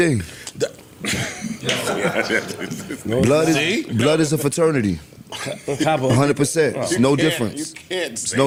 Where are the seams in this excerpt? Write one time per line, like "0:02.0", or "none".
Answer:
none